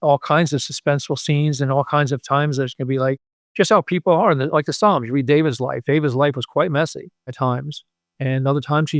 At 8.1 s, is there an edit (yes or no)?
no